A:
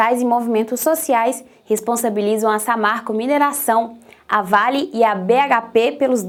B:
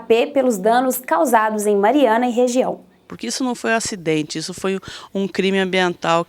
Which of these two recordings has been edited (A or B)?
B